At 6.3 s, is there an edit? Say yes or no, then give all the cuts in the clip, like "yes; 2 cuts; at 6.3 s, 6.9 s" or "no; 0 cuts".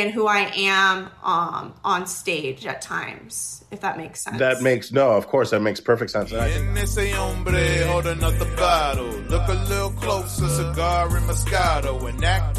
yes; 1 cut; at 6.3 s